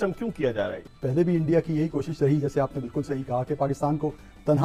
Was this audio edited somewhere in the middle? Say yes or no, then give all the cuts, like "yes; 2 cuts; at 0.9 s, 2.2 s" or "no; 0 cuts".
no; 0 cuts